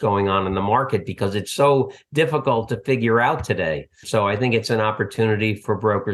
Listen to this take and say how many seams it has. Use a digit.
1